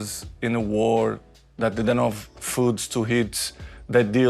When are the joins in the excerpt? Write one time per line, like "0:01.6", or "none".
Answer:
none

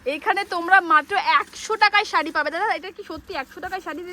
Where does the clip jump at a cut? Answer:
none

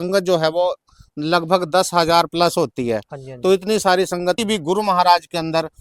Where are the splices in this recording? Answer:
0:04.4

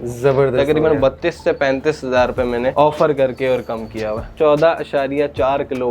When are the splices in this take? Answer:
0:02.7
0:04.3

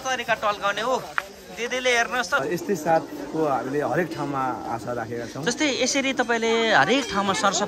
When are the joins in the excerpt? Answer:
0:02.4

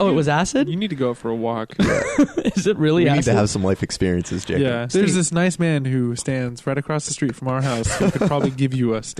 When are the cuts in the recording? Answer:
0:04.9

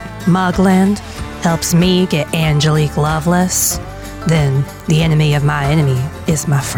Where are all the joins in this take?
none

